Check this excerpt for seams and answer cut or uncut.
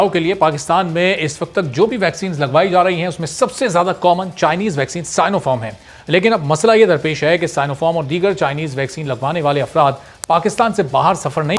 uncut